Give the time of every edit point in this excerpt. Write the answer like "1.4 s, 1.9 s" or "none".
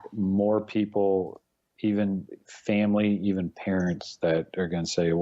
none